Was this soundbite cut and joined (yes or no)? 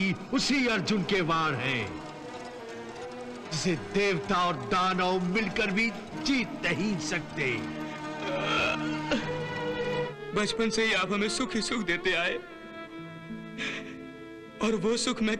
yes